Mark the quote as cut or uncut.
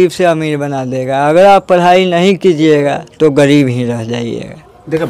uncut